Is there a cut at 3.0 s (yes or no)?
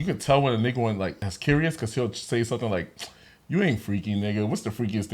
no